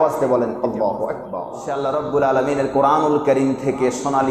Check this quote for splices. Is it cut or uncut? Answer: cut